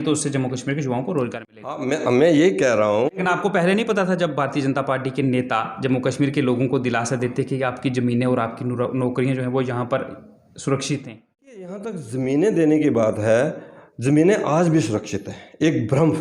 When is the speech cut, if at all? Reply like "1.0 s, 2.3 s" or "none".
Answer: 11.6 s